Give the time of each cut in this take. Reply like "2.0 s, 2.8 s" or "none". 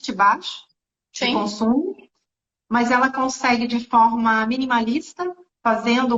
none